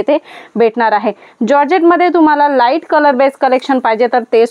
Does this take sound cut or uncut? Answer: uncut